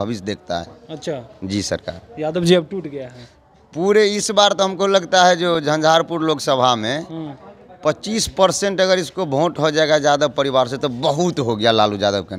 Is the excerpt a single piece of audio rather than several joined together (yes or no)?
yes